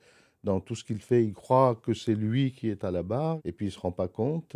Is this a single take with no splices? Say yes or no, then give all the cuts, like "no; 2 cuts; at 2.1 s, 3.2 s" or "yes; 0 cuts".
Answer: no; 1 cut; at 3.4 s